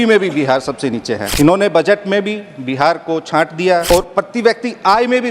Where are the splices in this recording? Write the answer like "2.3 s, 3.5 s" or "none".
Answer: 1.3 s, 3.9 s